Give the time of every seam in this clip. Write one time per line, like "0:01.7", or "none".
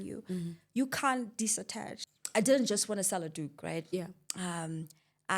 0:02.0